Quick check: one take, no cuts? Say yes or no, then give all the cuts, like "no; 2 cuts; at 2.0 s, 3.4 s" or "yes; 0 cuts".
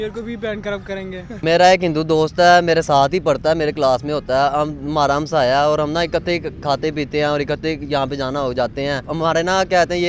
no; 2 cuts; at 1.4 s, 9.0 s